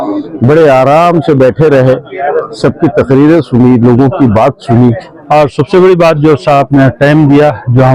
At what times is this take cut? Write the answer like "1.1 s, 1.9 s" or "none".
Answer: 5.1 s